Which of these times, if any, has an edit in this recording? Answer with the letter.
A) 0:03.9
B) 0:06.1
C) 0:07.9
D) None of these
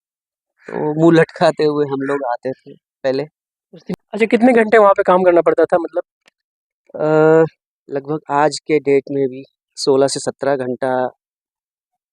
A